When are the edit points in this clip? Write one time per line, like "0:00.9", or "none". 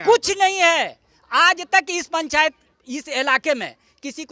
none